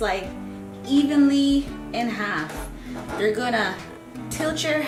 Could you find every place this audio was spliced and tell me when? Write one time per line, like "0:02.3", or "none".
none